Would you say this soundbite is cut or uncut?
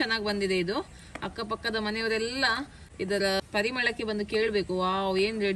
cut